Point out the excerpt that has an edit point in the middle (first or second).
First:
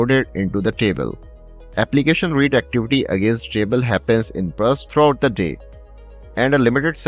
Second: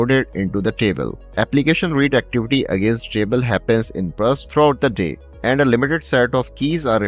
second